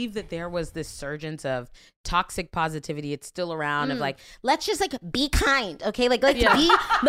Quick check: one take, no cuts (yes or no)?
yes